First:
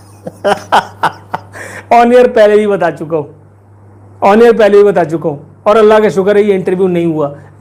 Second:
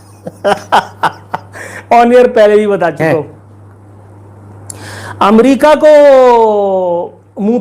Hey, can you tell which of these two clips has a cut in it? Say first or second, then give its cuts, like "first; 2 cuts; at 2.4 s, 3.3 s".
second; 1 cut; at 3.0 s